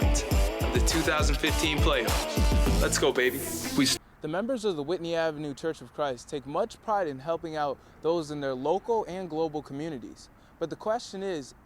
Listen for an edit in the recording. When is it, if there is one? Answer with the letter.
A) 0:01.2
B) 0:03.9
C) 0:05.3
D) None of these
B